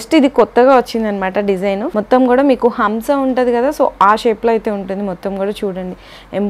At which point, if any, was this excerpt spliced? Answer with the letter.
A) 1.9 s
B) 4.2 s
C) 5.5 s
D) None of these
A